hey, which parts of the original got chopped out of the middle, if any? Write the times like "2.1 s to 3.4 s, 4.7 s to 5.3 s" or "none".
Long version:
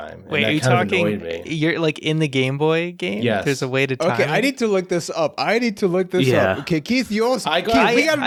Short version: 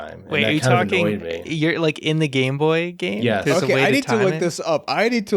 3.7 s to 4.2 s